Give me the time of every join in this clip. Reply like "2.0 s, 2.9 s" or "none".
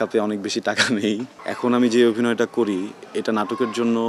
1.3 s